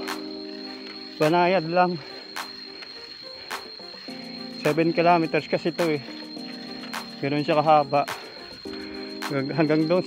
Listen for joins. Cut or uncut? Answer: uncut